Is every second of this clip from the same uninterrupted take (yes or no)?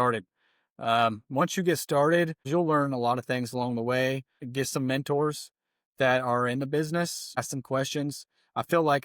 no